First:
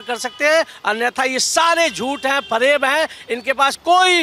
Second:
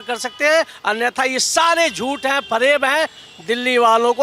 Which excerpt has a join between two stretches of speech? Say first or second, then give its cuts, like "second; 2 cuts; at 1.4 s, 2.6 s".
second; 1 cut; at 3.2 s